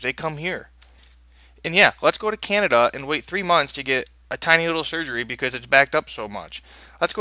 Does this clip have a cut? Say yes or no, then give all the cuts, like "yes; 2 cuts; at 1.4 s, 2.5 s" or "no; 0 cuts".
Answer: no; 0 cuts